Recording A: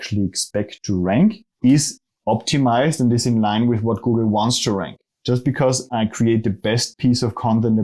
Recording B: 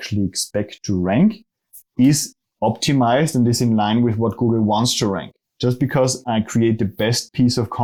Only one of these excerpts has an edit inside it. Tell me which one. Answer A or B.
A